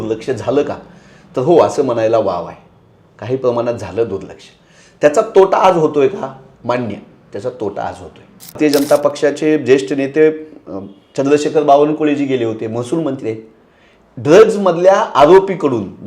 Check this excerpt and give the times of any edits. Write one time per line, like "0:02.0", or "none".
0:08.6